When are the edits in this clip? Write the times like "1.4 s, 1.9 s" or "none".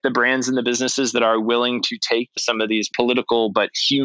2.8 s